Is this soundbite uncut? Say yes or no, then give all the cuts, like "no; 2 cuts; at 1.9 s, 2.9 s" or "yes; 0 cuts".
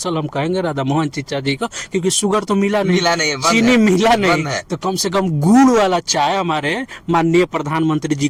yes; 0 cuts